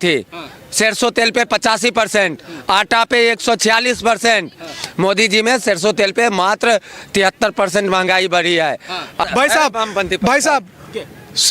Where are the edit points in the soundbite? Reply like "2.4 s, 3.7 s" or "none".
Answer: 9.2 s